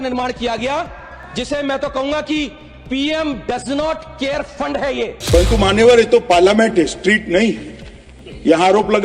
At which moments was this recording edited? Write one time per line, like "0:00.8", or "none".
0:05.2